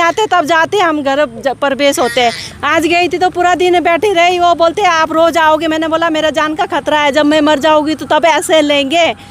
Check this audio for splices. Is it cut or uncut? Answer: cut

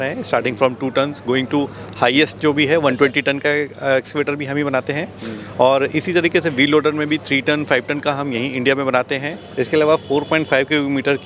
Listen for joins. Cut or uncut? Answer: cut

